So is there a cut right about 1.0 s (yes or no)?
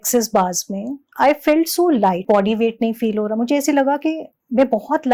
yes